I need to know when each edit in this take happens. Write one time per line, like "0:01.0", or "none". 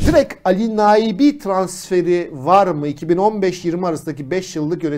none